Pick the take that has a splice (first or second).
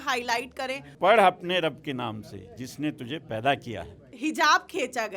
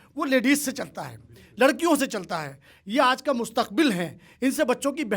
first